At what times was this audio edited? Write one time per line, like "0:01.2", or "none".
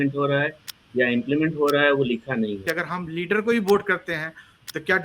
0:02.7